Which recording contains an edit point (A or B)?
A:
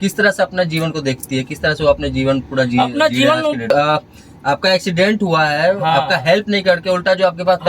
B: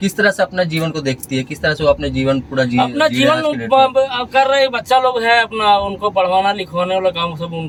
A